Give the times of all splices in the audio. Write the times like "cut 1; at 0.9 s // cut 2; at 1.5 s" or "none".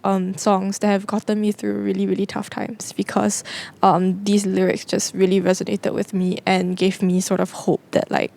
none

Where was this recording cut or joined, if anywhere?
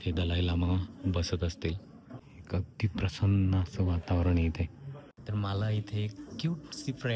none

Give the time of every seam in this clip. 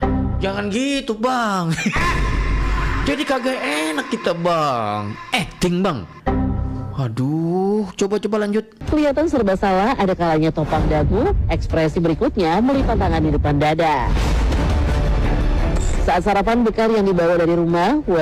none

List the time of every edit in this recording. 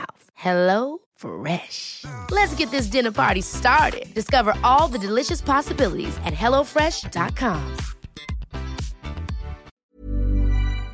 cut 1; at 9.8 s

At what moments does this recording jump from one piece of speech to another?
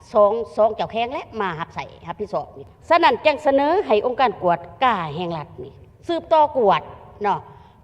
cut 1; at 2.6 s

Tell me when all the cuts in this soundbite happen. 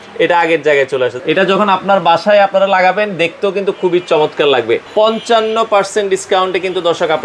cut 1; at 1.2 s // cut 2; at 4.9 s

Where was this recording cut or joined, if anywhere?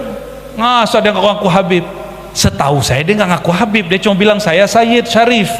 none

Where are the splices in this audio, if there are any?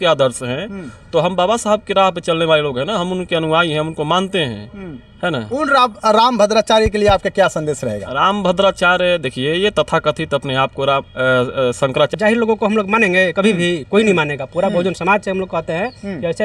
cut 1; at 12.1 s

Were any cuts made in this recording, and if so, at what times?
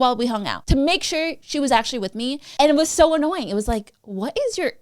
cut 1; at 2.4 s

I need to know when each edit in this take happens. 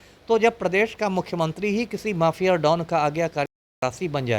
none

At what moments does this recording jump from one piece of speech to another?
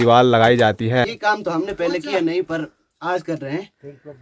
cut 1; at 1.1 s

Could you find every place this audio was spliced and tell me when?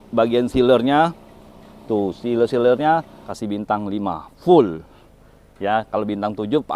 cut 1; at 3.2 s

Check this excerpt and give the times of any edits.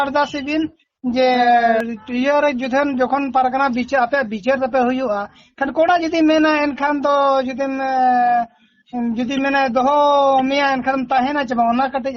cut 1; at 1.8 s

